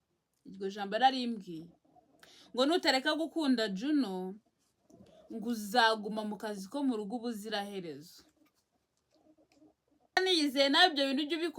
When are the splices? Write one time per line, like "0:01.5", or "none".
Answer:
0:10.2